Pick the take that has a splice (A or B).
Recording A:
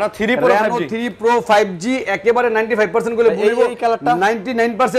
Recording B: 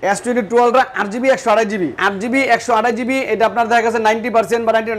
B